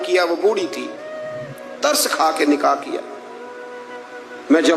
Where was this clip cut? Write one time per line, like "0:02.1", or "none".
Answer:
none